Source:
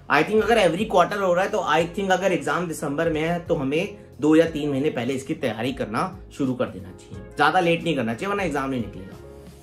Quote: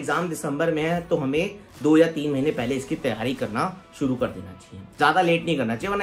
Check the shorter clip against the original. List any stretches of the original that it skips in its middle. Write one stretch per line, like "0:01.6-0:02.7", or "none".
none